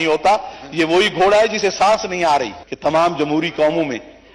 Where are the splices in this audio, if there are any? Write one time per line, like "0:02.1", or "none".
0:02.6